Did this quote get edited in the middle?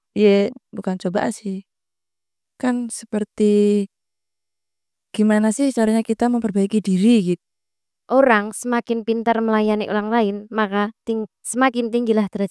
yes; 1 cut; at 7.2 s

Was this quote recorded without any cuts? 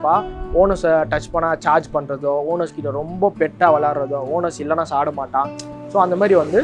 yes; 0 cuts

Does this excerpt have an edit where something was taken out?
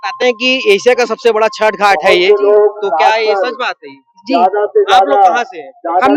no; 0 cuts

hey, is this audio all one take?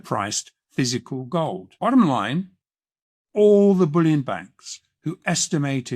no; 1 cut; at 1.7 s

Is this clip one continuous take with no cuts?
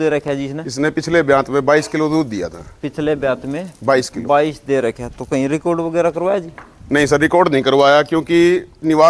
yes; 0 cuts

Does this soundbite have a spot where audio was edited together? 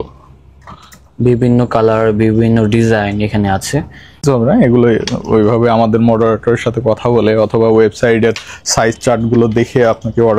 yes; 1 cut; at 4.2 s

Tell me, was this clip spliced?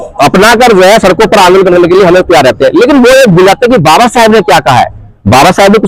no; 0 cuts

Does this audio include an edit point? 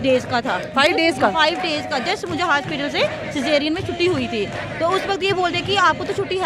no; 0 cuts

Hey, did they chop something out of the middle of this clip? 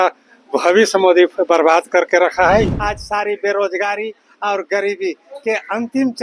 yes; 1 cut; at 2.8 s

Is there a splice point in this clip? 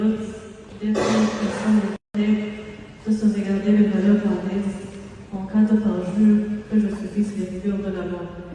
no; 0 cuts

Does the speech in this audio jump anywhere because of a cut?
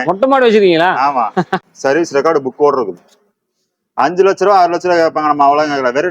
yes; 1 cut; at 1.6 s

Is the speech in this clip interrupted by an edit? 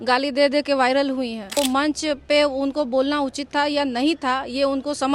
yes; 1 cut; at 1.6 s

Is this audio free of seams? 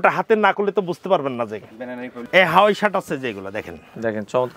no; 1 cut; at 2.2 s

